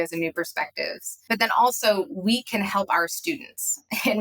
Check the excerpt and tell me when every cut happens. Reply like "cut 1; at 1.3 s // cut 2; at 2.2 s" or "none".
cut 1; at 1.2 s